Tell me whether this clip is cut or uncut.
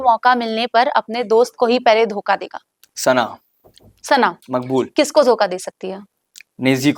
uncut